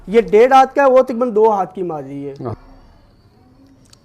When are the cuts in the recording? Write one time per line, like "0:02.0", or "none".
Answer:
0:02.5